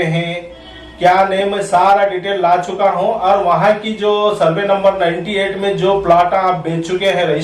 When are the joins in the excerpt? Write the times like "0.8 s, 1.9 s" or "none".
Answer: none